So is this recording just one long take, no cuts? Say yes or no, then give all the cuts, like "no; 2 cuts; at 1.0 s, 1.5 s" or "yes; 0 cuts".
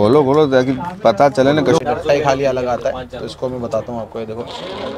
no; 1 cut; at 1.8 s